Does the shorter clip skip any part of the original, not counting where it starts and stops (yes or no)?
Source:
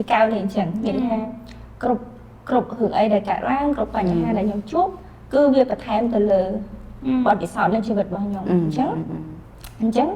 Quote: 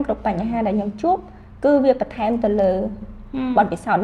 no